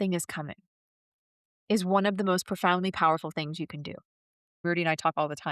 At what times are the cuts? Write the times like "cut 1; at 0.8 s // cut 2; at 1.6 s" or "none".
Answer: cut 1; at 4.6 s